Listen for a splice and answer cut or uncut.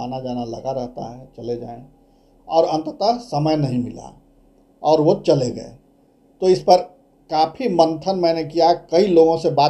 uncut